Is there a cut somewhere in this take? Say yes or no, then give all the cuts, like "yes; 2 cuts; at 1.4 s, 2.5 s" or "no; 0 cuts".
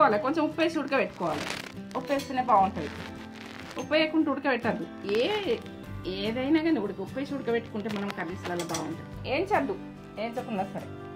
yes; 1 cut; at 9.3 s